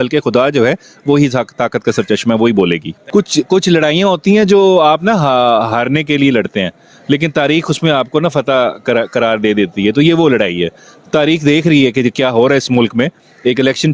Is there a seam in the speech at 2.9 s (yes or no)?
yes